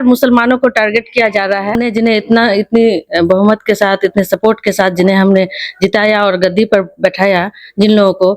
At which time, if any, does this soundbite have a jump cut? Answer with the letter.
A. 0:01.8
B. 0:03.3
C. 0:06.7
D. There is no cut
A